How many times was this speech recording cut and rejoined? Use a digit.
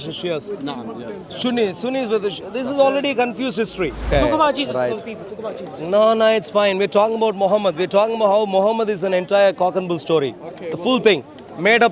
1